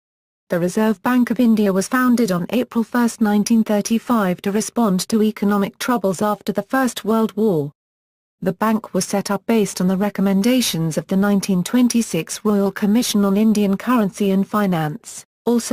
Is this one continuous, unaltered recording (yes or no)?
no